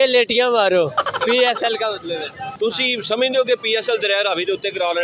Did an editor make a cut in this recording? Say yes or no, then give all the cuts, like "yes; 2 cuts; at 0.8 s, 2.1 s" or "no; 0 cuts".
yes; 1 cut; at 2.6 s